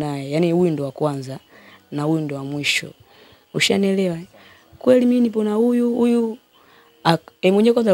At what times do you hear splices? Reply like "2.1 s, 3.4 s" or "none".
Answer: none